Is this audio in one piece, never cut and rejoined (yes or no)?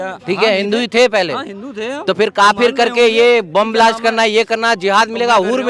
yes